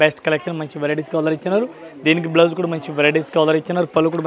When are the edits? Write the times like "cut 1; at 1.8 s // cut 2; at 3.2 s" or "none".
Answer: none